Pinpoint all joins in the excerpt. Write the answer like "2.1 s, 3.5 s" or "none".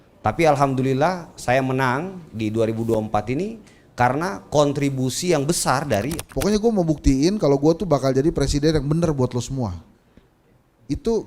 6.2 s